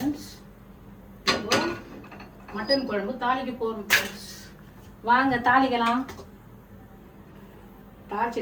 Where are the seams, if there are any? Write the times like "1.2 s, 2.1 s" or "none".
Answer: none